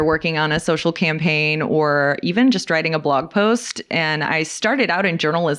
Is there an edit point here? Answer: no; 0 cuts

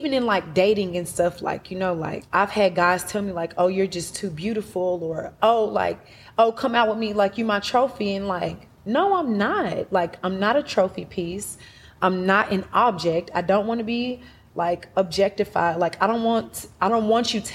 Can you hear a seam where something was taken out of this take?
yes; 1 cut; at 2.2 s

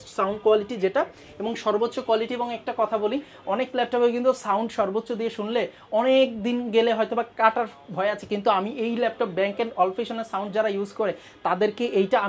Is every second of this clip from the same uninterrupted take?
yes; 0 cuts

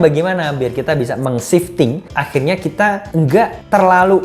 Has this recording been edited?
yes; 2 cuts; at 2.1 s, 3.4 s

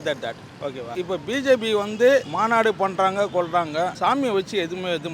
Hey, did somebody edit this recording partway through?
yes; 3 cuts; at 0.9 s, 2.3 s, 3.9 s

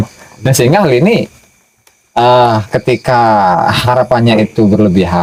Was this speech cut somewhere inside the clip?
no; 0 cuts

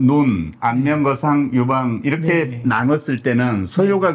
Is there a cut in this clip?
no; 0 cuts

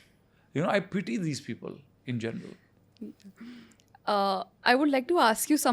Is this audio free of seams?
yes; 0 cuts

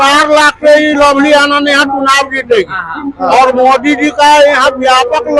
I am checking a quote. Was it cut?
no; 0 cuts

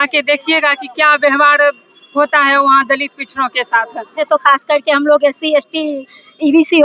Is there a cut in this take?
yes; 1 cut; at 4.1 s

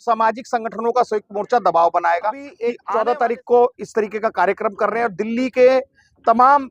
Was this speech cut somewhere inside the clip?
yes; 1 cut; at 2.7 s

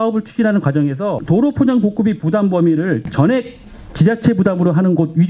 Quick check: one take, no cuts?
no; 2 cuts; at 1.2 s, 3.1 s

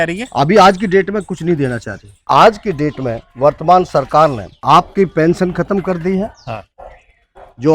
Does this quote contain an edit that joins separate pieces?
yes; 2 cuts; at 2.2 s, 4.5 s

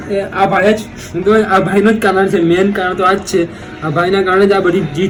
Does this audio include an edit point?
no; 0 cuts

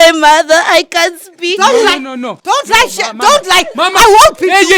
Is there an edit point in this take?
no; 0 cuts

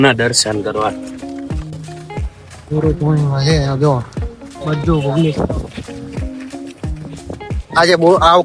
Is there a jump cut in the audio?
no; 0 cuts

